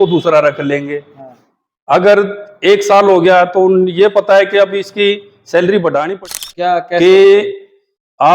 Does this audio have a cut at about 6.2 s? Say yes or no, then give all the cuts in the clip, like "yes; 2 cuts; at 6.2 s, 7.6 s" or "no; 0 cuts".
yes; 1 cut; at 6.2 s